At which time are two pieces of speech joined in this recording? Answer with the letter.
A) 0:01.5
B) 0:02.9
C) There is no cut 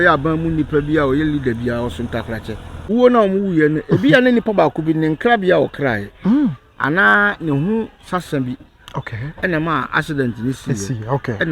B